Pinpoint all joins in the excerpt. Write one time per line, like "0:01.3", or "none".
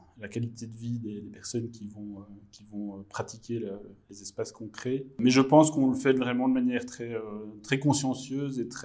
none